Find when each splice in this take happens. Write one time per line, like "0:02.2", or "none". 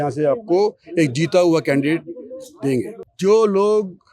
0:03.0

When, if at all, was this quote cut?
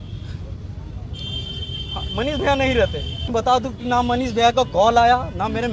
0:03.3

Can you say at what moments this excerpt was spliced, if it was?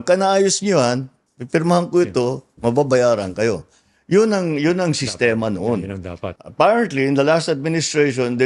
none

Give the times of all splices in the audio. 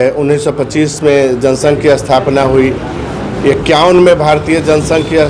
none

